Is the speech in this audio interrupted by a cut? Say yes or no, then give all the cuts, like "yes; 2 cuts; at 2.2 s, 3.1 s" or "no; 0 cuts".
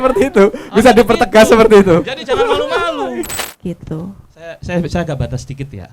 yes; 1 cut; at 3.4 s